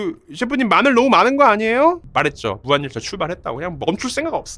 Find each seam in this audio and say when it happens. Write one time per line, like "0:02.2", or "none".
0:02.0